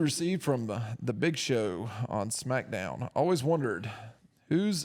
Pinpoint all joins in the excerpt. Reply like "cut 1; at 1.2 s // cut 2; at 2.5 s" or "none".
none